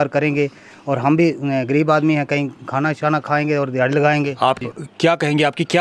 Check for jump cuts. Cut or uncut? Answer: cut